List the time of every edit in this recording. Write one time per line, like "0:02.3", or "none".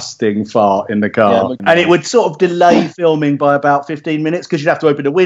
0:01.6